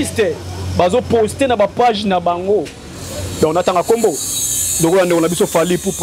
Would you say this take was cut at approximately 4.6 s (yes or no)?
no